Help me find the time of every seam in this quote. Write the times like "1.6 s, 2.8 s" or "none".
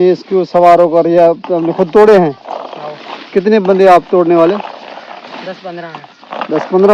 none

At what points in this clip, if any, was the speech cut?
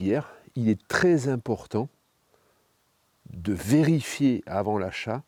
none

